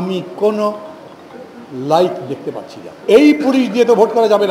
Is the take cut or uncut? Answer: cut